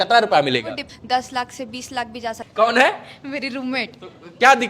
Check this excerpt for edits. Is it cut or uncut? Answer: cut